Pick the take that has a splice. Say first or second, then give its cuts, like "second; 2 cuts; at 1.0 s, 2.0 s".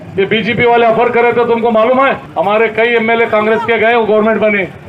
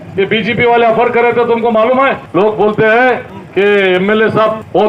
second; 1 cut; at 2.2 s